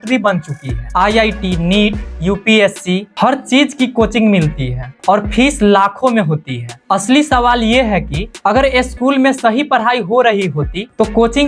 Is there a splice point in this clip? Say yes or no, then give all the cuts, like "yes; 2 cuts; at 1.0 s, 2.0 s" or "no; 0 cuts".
no; 0 cuts